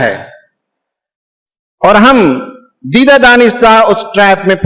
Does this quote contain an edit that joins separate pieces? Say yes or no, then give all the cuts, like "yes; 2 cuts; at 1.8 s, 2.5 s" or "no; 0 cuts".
no; 0 cuts